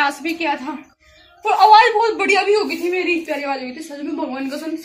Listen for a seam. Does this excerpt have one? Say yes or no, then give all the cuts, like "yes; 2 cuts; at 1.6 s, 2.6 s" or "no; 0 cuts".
yes; 1 cut; at 3.2 s